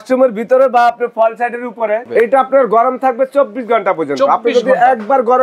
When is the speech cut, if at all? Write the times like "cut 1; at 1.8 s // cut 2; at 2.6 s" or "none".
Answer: cut 1; at 2.0 s